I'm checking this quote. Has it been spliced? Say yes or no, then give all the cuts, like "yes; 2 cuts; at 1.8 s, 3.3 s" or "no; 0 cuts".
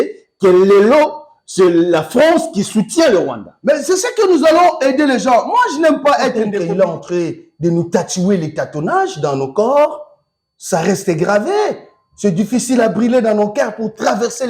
yes; 1 cut; at 6.6 s